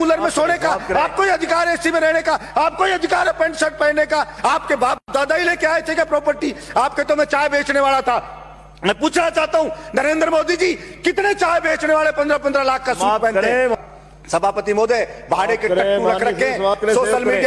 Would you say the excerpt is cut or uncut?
cut